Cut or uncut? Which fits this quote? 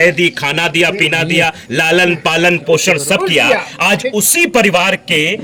uncut